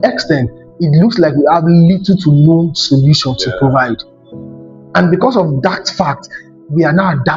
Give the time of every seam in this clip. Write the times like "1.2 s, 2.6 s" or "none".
none